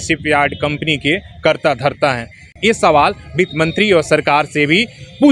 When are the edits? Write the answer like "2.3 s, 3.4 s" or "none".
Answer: 2.5 s